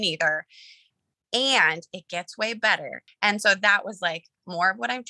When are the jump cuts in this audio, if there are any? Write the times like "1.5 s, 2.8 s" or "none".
3.0 s